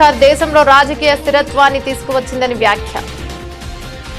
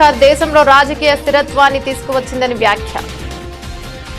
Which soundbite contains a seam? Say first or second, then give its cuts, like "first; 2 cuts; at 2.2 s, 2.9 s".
first; 1 cut; at 3.2 s